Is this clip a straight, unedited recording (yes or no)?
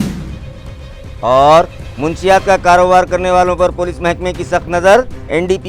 no